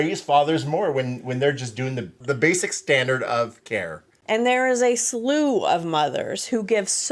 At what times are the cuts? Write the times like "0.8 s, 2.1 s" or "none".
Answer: 2.2 s, 4.1 s